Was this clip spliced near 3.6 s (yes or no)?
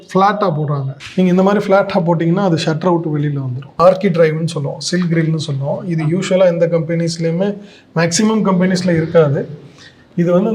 yes